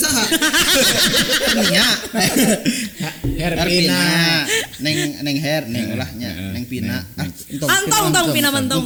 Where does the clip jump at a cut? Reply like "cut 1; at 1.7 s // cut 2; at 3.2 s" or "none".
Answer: none